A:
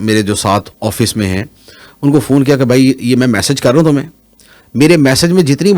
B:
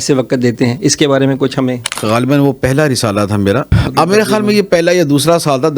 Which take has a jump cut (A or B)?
B